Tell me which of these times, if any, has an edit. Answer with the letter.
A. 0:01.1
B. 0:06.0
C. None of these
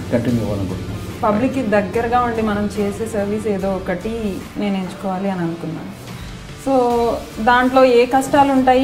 A